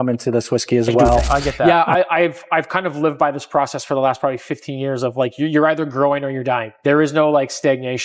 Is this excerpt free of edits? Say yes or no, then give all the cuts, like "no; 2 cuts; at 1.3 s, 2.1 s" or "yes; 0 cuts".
no; 1 cut; at 1.6 s